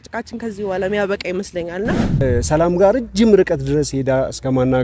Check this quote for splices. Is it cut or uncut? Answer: cut